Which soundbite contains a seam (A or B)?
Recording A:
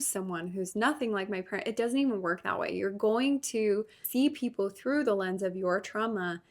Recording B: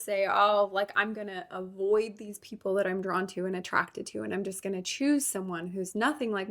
A